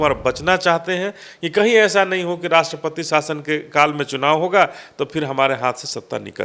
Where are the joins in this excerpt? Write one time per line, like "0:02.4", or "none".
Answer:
none